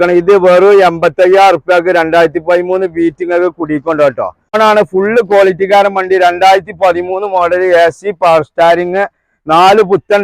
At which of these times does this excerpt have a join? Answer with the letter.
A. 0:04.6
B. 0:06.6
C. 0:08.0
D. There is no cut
A